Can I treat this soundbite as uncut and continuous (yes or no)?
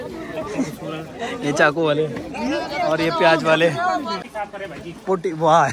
no